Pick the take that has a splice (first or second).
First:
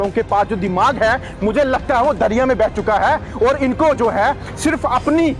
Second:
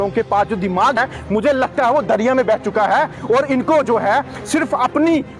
second